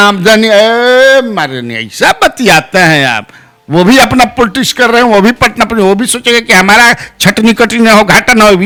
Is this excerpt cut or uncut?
uncut